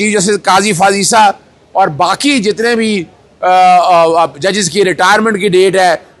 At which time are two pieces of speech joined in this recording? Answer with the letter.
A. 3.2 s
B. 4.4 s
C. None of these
C